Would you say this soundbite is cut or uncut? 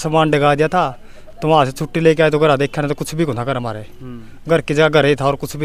uncut